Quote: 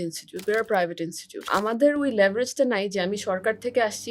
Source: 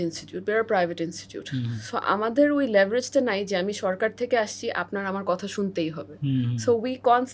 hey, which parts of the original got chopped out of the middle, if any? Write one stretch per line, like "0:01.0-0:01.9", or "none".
0:01.4-0:01.9